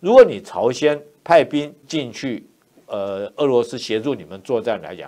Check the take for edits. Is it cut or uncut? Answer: cut